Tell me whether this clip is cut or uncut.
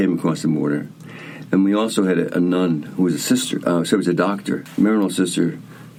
uncut